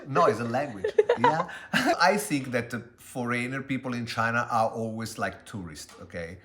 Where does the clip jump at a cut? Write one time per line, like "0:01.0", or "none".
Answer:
0:02.0